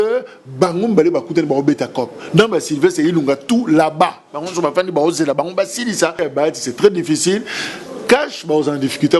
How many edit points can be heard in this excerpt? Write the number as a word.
one